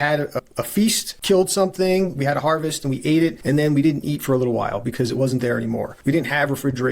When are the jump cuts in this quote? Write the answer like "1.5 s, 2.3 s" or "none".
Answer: 1.1 s, 3.4 s, 5.9 s